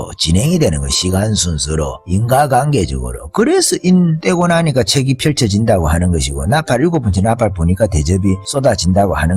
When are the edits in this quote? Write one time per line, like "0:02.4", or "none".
0:02.0
0:04.2
0:08.4

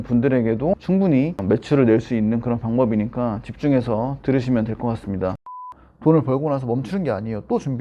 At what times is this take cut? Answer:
0:05.5

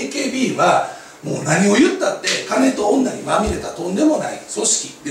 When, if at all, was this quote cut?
none

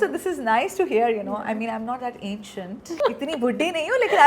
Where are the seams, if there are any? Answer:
0:03.0

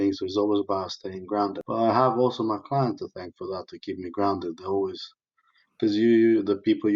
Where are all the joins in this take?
0:01.6

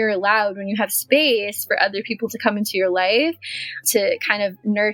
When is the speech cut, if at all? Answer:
0:03.8

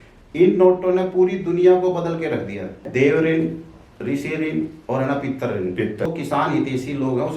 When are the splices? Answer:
0:02.9
0:06.1

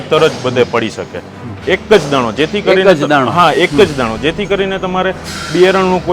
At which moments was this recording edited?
none

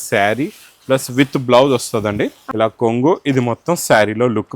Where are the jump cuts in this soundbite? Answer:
0:02.4

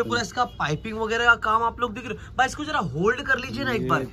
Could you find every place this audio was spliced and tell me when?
none

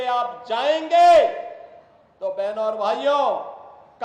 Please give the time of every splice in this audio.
none

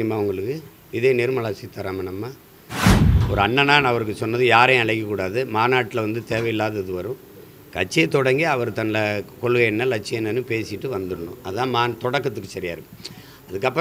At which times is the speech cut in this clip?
0:03.0

